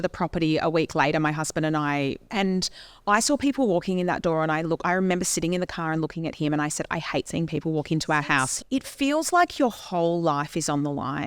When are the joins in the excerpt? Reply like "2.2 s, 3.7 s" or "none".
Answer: 2.2 s, 8.6 s

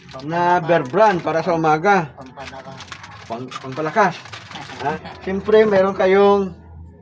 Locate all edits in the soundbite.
5.1 s

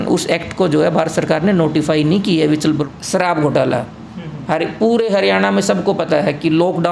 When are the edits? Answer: 2.9 s

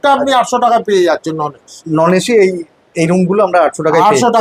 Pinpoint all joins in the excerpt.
none

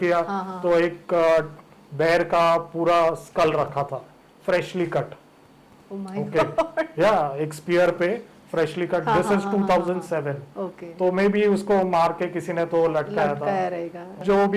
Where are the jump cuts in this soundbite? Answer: none

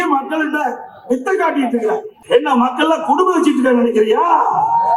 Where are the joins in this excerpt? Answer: 2.1 s

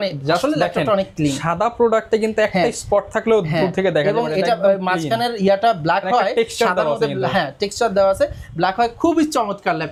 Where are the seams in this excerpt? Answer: none

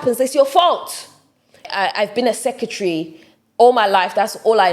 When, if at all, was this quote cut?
1.6 s

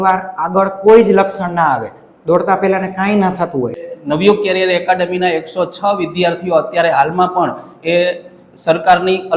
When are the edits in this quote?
3.8 s

